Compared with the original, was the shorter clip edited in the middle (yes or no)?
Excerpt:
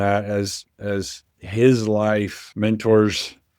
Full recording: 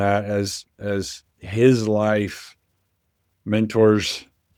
yes